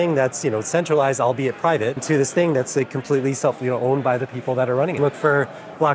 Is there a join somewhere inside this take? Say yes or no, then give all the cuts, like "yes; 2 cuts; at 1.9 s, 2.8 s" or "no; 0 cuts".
yes; 2 cuts; at 2.0 s, 4.9 s